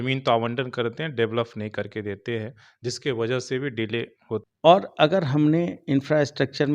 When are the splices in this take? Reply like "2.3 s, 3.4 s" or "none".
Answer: 4.4 s